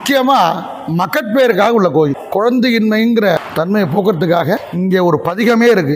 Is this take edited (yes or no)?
yes